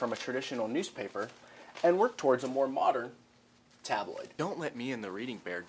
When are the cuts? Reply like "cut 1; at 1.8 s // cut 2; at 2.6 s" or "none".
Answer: cut 1; at 4.3 s